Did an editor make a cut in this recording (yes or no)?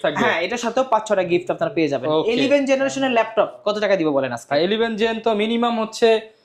no